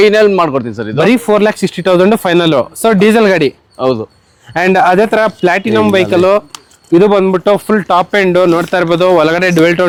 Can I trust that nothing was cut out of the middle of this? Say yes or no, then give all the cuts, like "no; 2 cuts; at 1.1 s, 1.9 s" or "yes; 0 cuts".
yes; 0 cuts